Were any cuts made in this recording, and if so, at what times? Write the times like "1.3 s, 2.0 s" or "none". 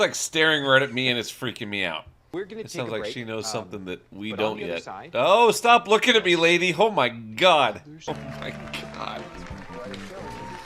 2.1 s, 7.9 s